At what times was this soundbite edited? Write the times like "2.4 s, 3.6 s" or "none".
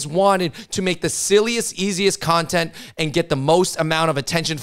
none